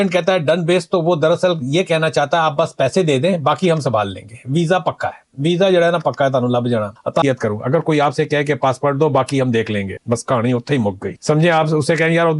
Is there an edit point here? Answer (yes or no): yes